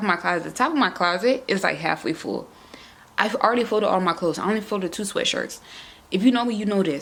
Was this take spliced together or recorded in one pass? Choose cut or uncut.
uncut